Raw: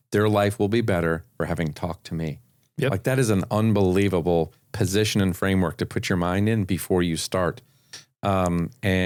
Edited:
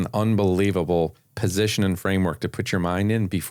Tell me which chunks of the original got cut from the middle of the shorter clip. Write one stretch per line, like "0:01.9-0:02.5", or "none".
none